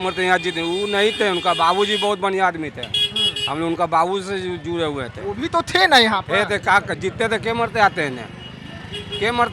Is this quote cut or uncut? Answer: uncut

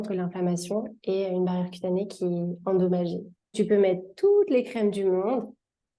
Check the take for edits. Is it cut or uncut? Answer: cut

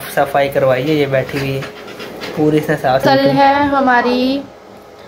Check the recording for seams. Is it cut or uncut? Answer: cut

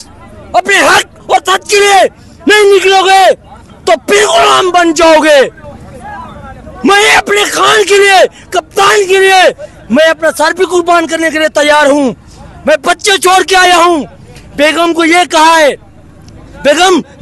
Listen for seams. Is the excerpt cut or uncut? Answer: uncut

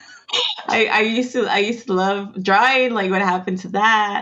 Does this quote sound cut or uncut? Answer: uncut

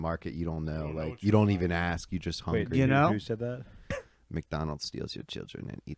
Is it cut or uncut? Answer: cut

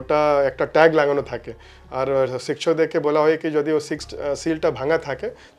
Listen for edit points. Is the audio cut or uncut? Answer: uncut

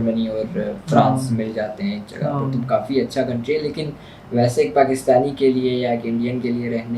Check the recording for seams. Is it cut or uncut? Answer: uncut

